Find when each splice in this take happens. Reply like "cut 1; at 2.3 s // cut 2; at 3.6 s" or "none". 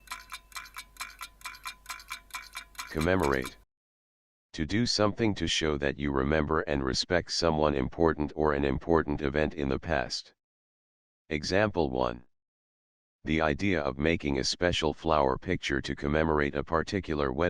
cut 1; at 2.9 s